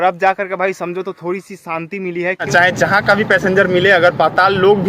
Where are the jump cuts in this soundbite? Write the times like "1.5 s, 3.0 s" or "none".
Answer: 2.5 s